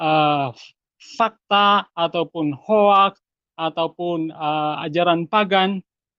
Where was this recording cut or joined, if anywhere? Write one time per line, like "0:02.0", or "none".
none